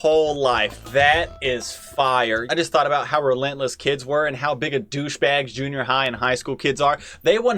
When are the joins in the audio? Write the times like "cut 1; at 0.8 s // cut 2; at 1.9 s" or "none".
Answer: cut 1; at 2.4 s